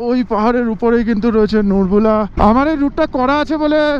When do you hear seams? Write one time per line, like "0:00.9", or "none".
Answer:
0:02.3